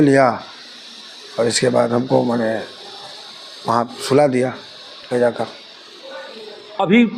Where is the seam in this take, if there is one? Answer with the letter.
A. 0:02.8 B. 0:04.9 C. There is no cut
C